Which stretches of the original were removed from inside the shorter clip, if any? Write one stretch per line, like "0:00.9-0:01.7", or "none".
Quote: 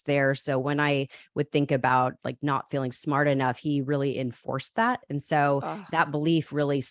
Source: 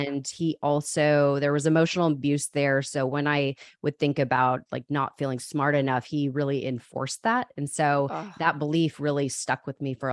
none